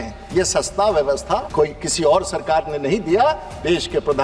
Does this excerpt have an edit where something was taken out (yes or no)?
yes